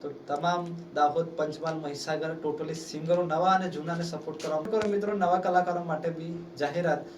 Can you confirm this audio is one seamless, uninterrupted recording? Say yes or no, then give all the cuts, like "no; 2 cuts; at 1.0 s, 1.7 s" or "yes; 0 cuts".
no; 1 cut; at 4.7 s